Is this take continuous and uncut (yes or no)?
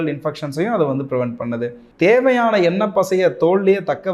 no